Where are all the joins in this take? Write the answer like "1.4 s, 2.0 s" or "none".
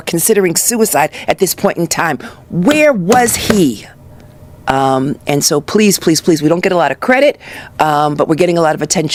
none